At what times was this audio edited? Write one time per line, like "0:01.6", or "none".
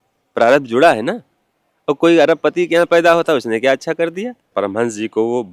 0:04.4